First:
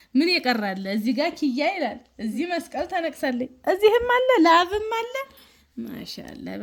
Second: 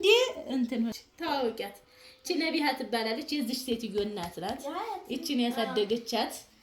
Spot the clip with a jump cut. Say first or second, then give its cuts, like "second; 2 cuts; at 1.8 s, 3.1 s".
second; 1 cut; at 1.0 s